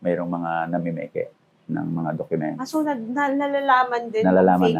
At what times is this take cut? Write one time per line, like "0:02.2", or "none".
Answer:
none